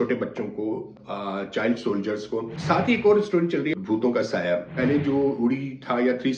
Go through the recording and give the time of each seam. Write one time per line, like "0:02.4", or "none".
0:02.5
0:03.7
0:04.7